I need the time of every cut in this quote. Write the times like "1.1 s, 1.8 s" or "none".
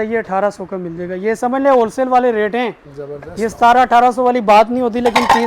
none